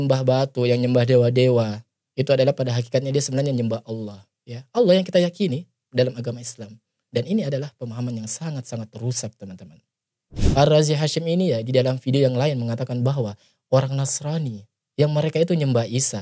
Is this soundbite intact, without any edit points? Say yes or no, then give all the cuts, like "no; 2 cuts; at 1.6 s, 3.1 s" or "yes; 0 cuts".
no; 1 cut; at 10.1 s